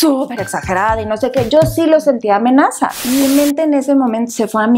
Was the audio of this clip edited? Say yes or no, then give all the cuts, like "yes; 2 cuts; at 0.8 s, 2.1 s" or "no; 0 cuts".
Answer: yes; 1 cut; at 3.0 s